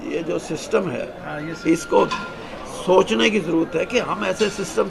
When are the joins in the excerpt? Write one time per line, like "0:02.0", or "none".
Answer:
none